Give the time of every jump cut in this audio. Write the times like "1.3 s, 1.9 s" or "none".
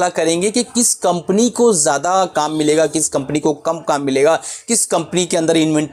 none